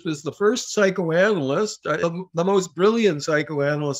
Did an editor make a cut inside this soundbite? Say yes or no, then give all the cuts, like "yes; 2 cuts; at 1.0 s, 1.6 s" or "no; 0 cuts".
yes; 1 cut; at 2.0 s